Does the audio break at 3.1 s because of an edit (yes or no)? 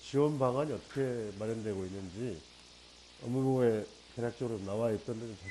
no